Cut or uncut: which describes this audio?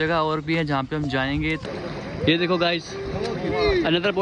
cut